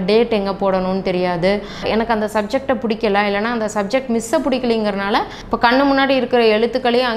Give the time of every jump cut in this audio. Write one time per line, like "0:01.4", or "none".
0:01.9
0:05.4